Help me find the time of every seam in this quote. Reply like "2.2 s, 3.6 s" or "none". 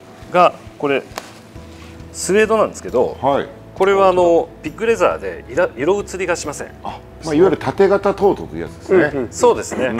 7.1 s

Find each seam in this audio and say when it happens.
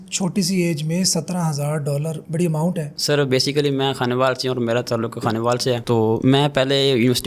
none

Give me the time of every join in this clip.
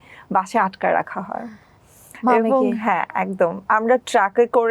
3.6 s

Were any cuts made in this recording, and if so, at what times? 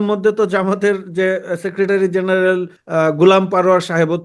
2.8 s

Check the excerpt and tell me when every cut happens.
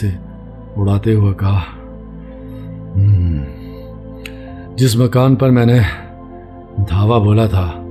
none

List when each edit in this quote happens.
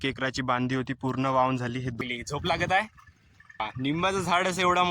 2.0 s, 3.7 s

